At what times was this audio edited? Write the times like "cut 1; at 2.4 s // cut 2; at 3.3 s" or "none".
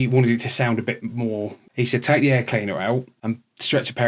cut 1; at 1.6 s // cut 2; at 3.1 s